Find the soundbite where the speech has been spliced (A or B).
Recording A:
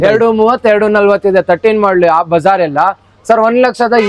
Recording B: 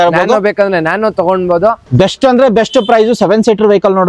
B